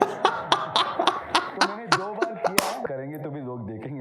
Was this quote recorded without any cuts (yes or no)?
no